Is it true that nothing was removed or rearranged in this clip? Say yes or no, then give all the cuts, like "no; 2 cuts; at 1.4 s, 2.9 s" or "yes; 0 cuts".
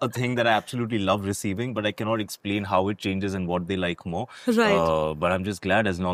yes; 0 cuts